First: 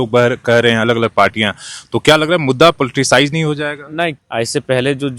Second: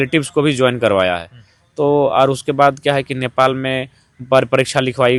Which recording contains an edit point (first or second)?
first